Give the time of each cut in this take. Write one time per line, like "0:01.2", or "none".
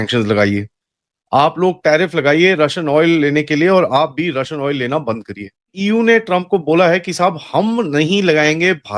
0:05.7